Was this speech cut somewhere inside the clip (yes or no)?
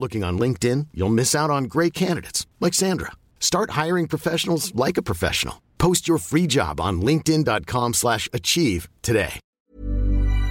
yes